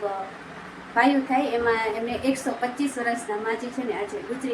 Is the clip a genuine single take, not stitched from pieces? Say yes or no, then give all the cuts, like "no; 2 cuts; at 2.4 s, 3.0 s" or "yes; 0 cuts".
yes; 0 cuts